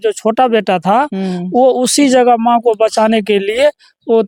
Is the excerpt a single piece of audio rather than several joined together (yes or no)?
yes